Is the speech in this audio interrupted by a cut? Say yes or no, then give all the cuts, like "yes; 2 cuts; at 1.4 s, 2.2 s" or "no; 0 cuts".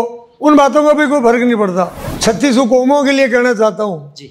yes; 1 cut; at 1.9 s